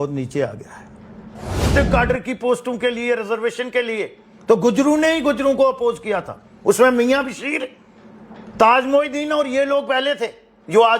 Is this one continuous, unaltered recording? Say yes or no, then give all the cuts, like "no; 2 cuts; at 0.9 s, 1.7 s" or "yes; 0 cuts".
no; 1 cut; at 1.7 s